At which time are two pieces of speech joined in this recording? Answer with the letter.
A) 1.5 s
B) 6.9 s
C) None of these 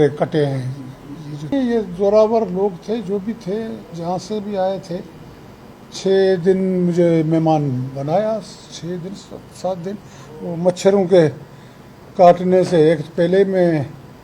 A